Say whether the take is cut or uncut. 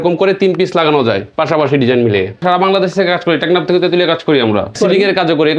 cut